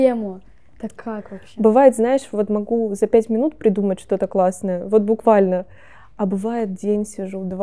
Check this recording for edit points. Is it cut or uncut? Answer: uncut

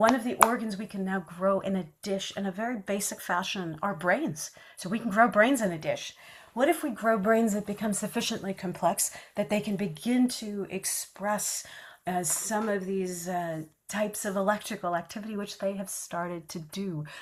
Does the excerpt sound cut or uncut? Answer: uncut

